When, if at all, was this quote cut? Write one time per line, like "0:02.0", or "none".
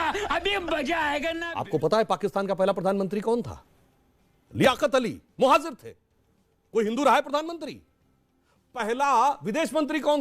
0:01.4